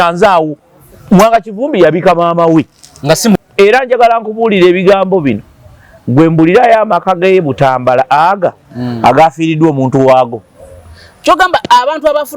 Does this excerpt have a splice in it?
yes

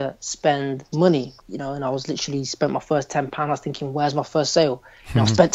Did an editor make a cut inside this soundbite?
yes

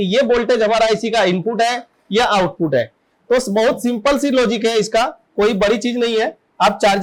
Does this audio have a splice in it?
no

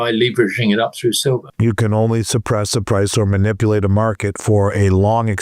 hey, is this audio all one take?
no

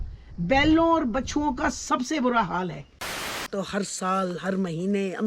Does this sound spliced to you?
yes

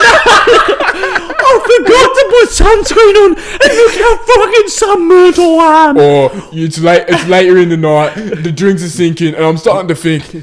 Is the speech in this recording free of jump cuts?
yes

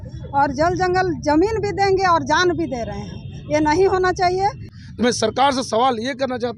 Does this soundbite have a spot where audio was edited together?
yes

